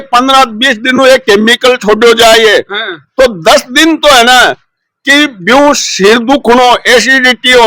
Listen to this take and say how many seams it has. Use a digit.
0